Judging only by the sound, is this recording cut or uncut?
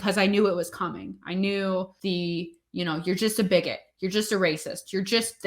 cut